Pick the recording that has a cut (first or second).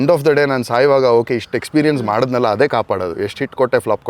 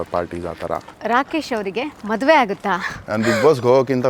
second